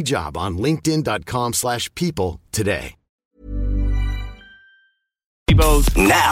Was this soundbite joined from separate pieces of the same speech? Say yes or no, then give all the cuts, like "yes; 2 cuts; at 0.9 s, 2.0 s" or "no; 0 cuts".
yes; 1 cut; at 5.4 s